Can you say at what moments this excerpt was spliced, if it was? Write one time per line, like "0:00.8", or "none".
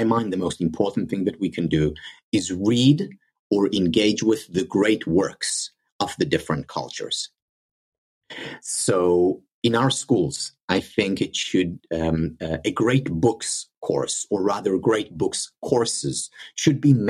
none